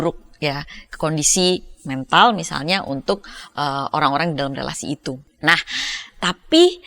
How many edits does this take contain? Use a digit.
1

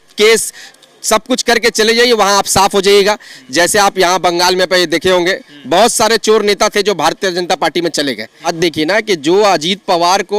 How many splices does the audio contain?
1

